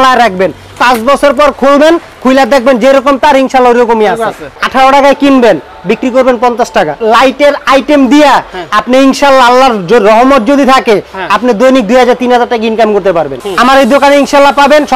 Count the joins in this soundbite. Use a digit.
3